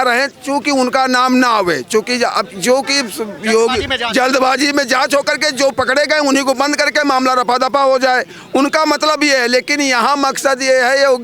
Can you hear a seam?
no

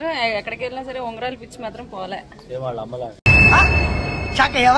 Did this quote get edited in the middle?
no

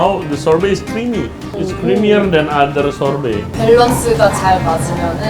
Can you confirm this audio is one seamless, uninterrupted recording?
no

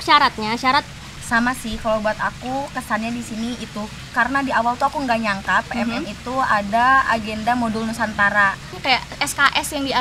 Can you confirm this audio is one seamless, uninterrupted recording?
no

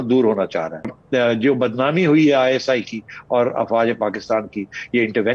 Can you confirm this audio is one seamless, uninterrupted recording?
no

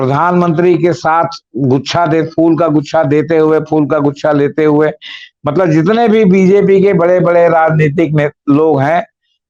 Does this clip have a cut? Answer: no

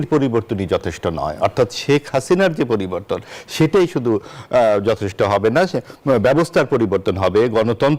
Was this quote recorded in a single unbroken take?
yes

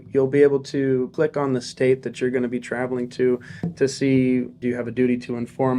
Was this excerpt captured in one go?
no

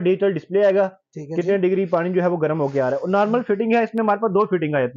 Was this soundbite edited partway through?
no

